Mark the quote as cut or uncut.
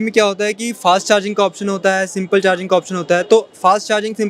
uncut